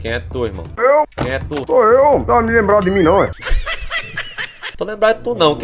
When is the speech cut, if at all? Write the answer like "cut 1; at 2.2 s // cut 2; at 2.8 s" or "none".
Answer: cut 1; at 1.6 s